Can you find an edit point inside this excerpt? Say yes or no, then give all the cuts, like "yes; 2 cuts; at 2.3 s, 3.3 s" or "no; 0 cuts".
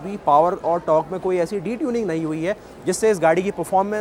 no; 0 cuts